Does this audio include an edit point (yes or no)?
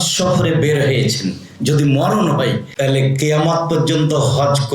yes